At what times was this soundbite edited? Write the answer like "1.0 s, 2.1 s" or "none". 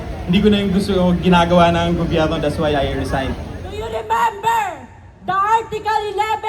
3.6 s